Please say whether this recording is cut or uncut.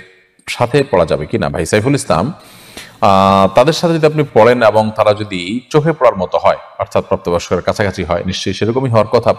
uncut